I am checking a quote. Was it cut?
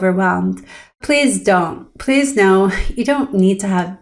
yes; 1 cut; at 1.0 s

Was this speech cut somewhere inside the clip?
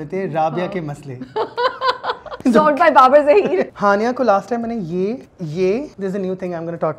yes; 4 cuts; at 2.3 s, 3.7 s, 5.3 s, 5.9 s

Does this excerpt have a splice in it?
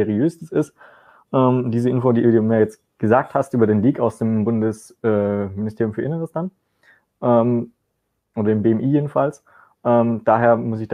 no; 0 cuts

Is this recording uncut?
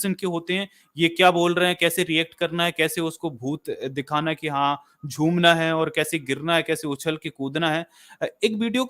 yes; 0 cuts

